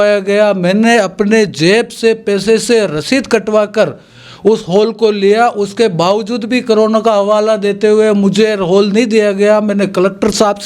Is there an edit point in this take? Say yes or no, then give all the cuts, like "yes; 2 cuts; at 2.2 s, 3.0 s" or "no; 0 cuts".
no; 0 cuts